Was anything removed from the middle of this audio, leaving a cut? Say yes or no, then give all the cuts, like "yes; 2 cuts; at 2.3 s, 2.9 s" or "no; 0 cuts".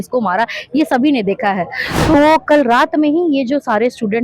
yes; 1 cut; at 2.1 s